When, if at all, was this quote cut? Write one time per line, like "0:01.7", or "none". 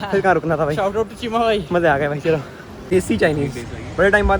0:02.8